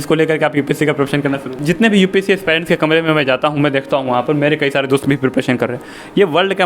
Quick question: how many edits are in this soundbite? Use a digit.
1